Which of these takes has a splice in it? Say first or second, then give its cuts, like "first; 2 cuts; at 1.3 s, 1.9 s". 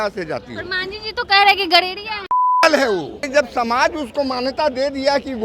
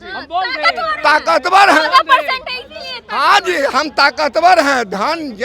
first; 1 cut; at 3.2 s